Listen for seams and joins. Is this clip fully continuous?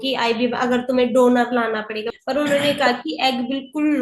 no; 1 cut; at 2.0 s

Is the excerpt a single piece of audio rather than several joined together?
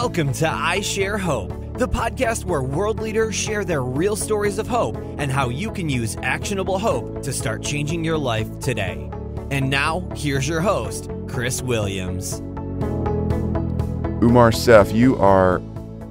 no; 1 cut; at 12.7 s

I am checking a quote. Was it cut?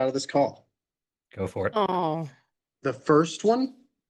no; 0 cuts

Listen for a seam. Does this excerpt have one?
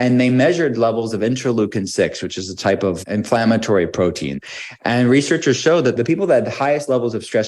yes; 3 cuts; at 3.0 s, 4.4 s, 6.0 s

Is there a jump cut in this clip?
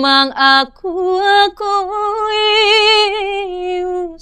no; 0 cuts

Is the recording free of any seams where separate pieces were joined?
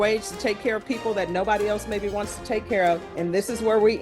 no; 1 cut; at 3.1 s

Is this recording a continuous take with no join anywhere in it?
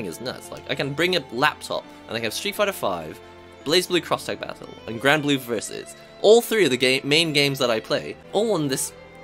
no; 1 cut; at 8.2 s

